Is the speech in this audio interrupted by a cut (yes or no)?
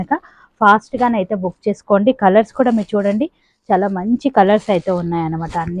no